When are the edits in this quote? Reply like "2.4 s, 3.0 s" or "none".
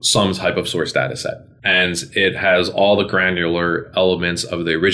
1.5 s